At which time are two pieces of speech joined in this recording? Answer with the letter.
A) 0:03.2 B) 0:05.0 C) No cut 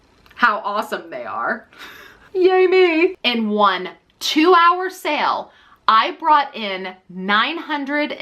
A